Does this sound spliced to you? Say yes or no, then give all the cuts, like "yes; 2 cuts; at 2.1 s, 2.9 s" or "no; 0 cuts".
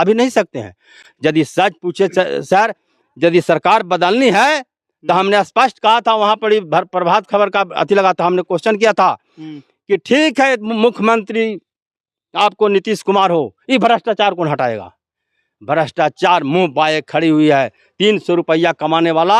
no; 0 cuts